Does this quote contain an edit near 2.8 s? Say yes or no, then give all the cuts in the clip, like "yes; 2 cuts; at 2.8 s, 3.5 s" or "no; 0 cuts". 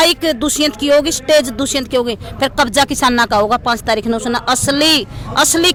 no; 0 cuts